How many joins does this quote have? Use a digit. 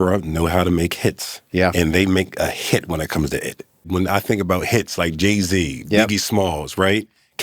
1